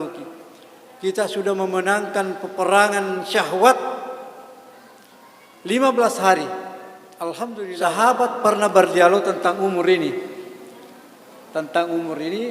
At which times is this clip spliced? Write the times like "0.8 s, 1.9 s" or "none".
7.8 s